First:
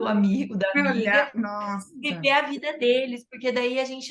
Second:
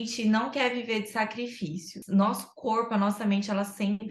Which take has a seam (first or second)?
second